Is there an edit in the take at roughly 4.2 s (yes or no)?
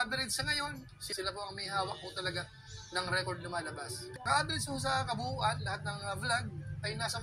yes